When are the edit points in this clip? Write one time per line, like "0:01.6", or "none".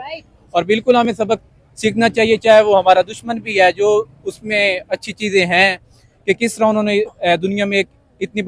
none